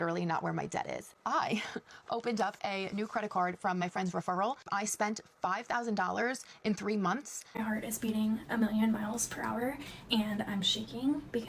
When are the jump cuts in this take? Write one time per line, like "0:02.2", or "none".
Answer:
0:07.4

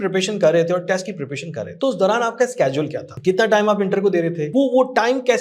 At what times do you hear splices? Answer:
0:01.6
0:03.0
0:04.4

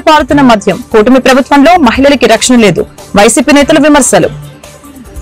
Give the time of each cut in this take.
none

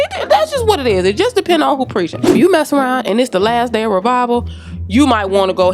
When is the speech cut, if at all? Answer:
none

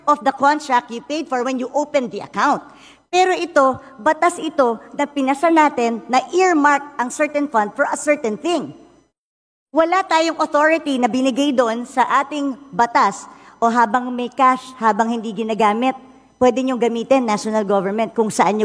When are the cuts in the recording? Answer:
none

